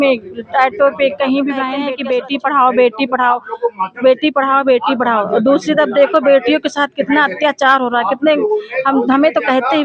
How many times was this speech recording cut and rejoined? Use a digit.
1